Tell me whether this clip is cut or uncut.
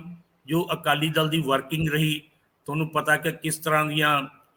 uncut